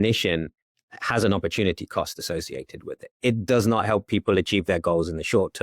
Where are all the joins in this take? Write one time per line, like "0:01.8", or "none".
0:03.1